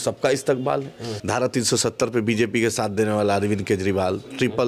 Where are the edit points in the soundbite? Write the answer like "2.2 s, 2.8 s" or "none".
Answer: 1.1 s